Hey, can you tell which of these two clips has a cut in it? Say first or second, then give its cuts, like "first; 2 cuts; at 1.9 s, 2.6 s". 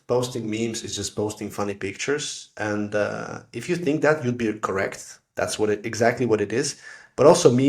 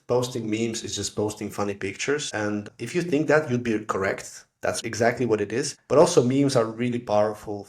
second; 3 cuts; at 2.5 s, 4.8 s, 5.8 s